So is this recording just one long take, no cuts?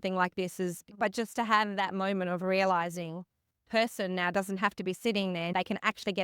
no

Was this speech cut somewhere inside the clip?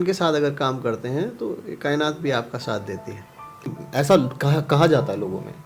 yes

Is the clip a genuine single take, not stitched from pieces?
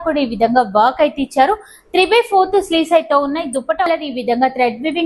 no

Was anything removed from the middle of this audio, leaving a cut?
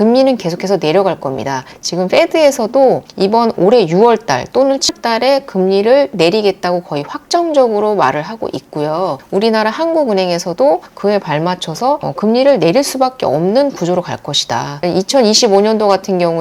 yes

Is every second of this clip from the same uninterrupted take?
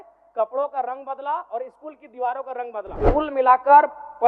no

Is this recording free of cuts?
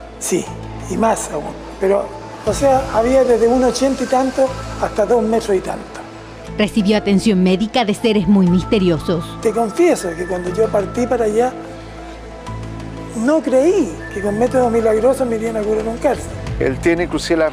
yes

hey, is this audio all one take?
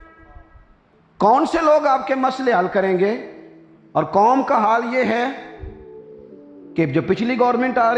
yes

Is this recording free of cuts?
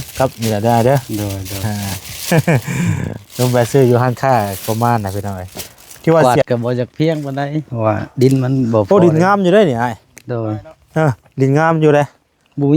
no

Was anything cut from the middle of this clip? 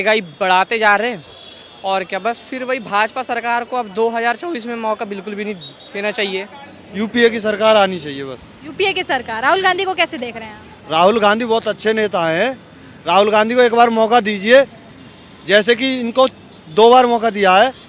yes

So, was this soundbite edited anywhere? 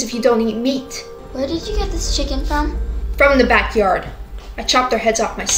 no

